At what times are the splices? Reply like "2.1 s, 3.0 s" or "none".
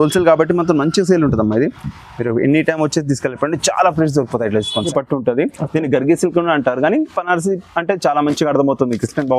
4.9 s